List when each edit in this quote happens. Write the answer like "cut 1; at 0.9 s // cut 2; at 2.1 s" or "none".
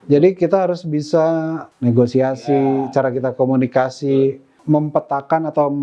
cut 1; at 1.6 s // cut 2; at 4.5 s